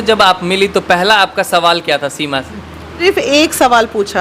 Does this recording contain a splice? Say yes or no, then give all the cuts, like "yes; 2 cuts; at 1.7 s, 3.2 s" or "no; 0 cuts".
yes; 1 cut; at 3.0 s